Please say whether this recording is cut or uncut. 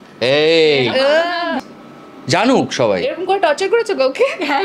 cut